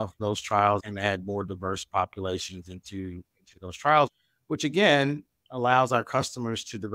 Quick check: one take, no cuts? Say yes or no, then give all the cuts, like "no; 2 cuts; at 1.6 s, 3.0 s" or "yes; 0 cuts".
no; 2 cuts; at 0.8 s, 4.3 s